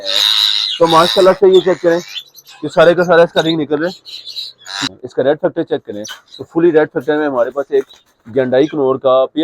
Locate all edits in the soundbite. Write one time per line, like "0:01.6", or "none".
0:04.9

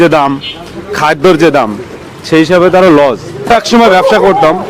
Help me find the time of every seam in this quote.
0:03.5

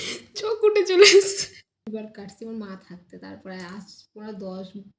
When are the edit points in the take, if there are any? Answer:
0:01.9

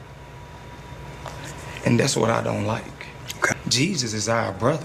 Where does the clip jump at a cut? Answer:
0:03.5

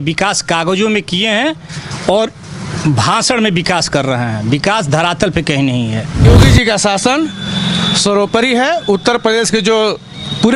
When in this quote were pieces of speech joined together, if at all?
0:06.3

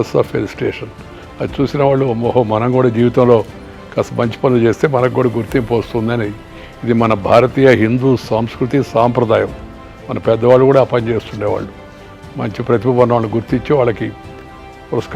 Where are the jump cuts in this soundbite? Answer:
none

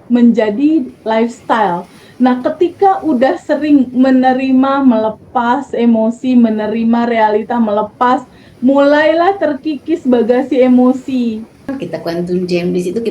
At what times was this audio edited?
0:11.7

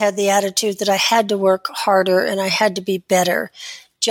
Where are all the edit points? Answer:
none

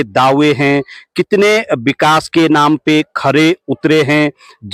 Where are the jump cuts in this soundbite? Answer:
none

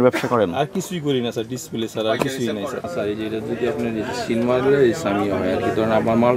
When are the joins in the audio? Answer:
0:02.8

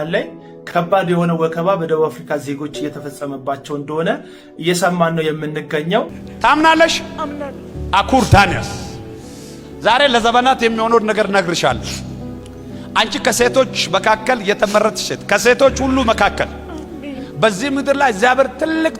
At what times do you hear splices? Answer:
0:06.2

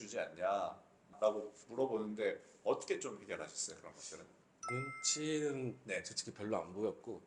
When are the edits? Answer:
0:01.1

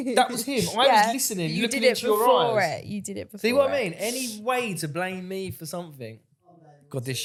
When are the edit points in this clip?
none

